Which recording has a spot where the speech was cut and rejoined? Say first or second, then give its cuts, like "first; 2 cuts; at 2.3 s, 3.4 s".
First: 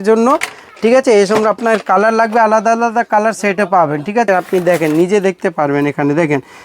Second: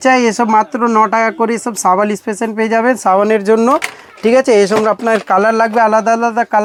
first; 1 cut; at 4.3 s